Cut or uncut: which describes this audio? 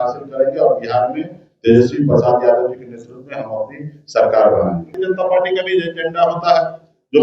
cut